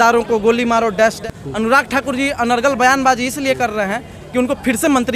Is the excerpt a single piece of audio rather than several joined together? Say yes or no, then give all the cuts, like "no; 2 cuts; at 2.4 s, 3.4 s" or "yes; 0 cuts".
no; 1 cut; at 1.2 s